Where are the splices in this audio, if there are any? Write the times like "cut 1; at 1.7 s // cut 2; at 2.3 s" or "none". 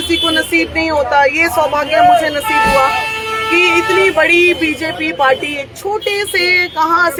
none